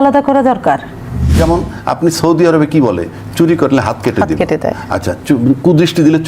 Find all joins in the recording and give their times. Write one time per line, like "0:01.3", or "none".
0:01.3